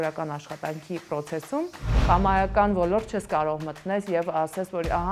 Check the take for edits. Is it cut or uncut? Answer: cut